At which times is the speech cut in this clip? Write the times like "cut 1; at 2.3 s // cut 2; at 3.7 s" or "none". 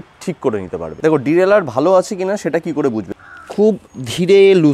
cut 1; at 0.9 s // cut 2; at 3.1 s